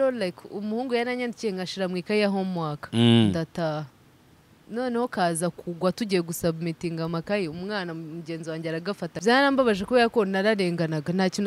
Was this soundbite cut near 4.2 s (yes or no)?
no